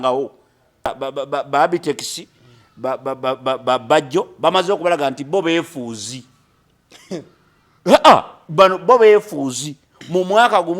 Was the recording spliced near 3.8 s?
no; 1 cut; at 0.9 s

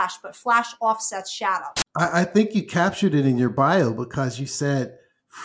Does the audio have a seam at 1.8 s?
yes; 1 cut; at 1.8 s

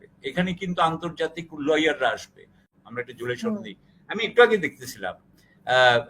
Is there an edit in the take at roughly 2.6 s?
yes; 1 cut; at 2.6 s

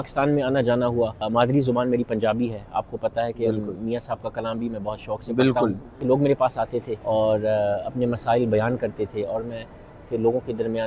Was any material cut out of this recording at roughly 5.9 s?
yes; 3 cuts; at 1.2 s, 5.9 s, 6.9 s

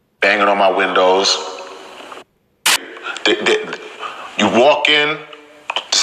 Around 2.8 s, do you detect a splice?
yes; 1 cut; at 2.8 s

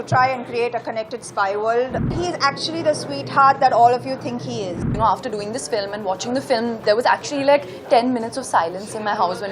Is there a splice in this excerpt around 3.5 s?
no; 2 cuts; at 2.1 s, 4.9 s

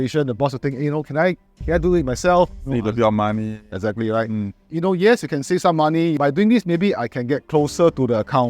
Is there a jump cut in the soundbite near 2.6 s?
no; 2 cuts; at 4.6 s, 6.2 s

